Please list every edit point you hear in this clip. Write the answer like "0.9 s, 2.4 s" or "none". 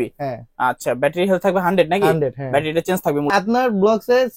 3.3 s